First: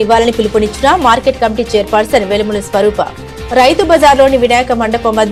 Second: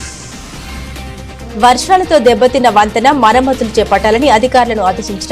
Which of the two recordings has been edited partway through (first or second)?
second